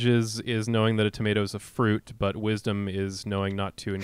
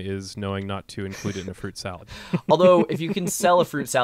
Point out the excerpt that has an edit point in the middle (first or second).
second